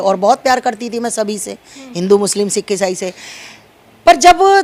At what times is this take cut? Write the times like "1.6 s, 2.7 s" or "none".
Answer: none